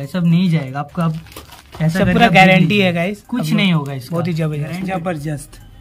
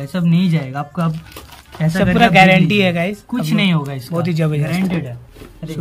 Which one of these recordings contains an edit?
first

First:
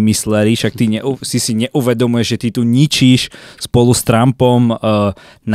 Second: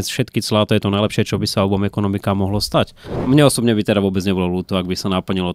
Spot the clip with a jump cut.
second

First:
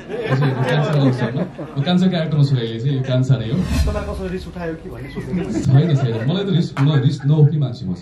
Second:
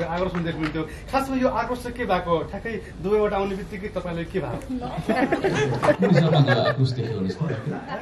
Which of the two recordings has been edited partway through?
first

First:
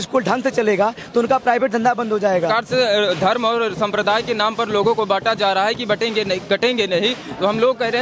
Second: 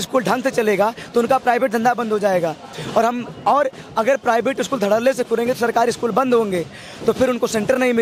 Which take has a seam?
first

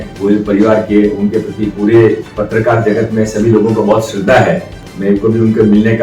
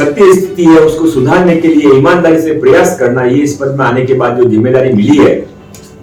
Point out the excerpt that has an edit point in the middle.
first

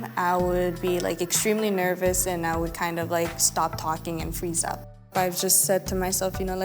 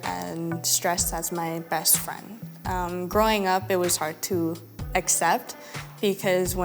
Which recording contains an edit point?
first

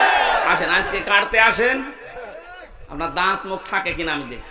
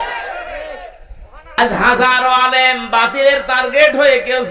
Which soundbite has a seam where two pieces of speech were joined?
second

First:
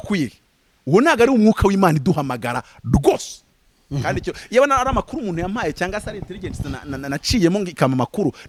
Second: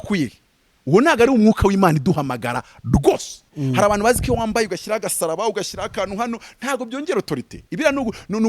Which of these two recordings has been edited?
second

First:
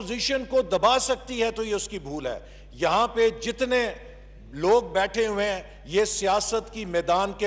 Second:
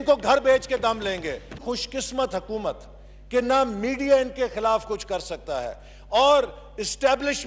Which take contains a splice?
second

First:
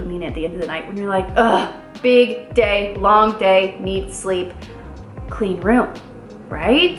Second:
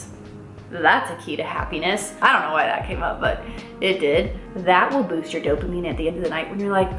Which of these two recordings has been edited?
second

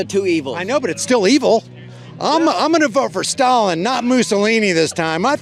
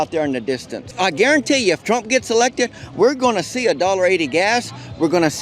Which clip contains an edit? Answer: second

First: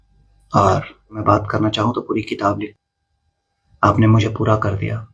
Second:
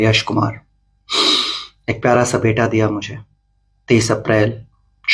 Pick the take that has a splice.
first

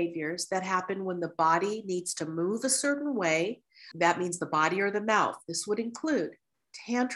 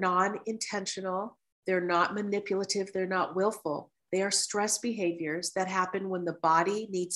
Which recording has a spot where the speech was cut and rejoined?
first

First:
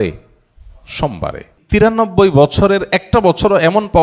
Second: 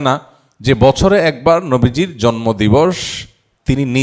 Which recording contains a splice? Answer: first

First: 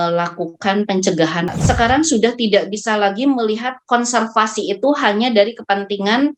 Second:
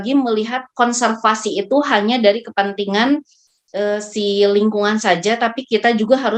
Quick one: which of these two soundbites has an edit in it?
first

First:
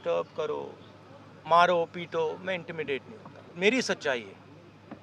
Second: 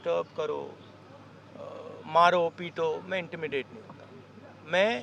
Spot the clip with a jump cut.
first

